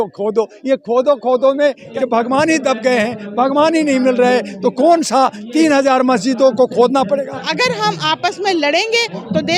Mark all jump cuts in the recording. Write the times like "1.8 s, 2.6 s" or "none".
1.9 s, 7.4 s